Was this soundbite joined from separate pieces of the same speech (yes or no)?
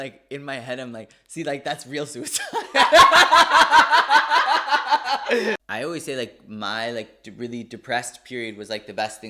yes